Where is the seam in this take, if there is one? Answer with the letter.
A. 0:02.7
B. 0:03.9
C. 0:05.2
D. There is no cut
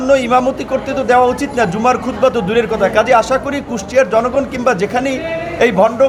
D